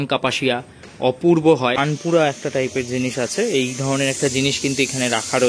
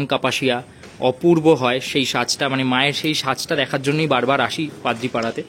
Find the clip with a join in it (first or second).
first